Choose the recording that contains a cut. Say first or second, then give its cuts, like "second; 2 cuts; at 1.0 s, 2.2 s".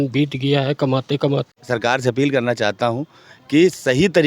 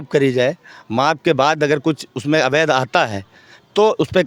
first; 1 cut; at 1.5 s